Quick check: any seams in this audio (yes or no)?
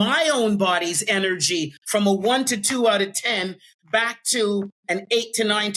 no